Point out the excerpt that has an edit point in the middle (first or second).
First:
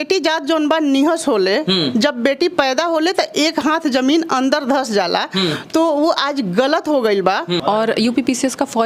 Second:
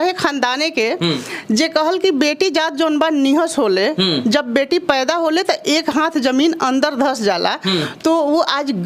first